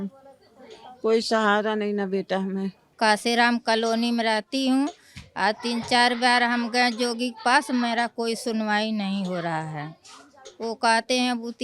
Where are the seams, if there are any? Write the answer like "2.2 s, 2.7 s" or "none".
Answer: 2.8 s